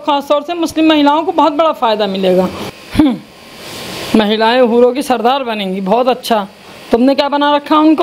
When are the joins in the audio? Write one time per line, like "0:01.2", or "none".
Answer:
0:02.6